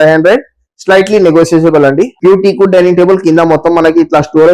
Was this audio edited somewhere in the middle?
yes; 1 cut; at 2.1 s

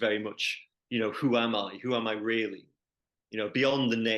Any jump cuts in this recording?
no; 0 cuts

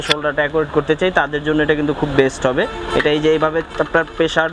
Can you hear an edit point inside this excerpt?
no; 0 cuts

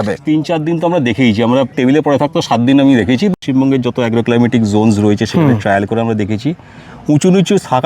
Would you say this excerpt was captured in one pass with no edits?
no; 2 cuts; at 1.7 s, 3.4 s

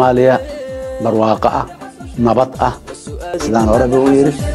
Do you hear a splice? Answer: yes; 1 cut; at 3.4 s

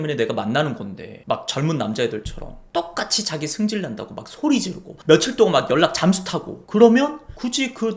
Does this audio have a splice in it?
no; 0 cuts

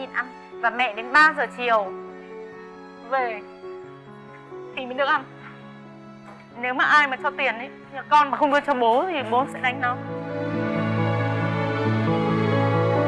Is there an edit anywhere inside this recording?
no; 0 cuts

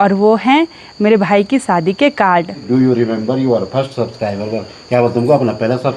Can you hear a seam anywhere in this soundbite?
yes; 1 cut; at 2.6 s

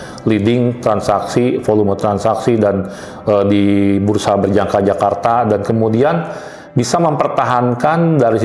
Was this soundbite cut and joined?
no; 0 cuts

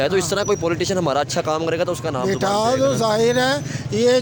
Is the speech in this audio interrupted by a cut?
no; 0 cuts

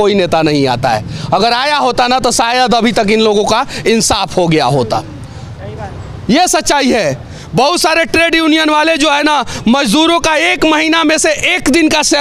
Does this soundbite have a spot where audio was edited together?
no; 0 cuts

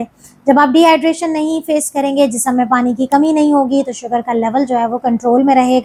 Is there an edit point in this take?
no; 0 cuts

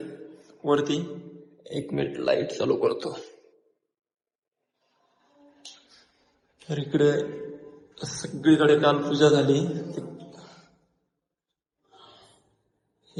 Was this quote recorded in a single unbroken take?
yes; 0 cuts

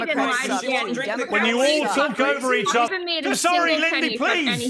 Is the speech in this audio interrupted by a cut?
yes; 1 cut; at 2.9 s

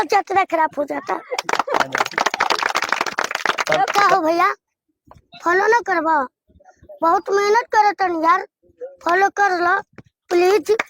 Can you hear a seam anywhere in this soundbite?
yes; 1 cut; at 3.9 s

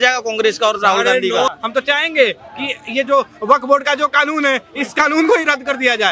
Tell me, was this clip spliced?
yes; 1 cut; at 1.5 s

